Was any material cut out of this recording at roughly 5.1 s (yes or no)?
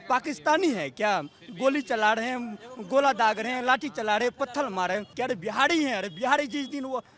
yes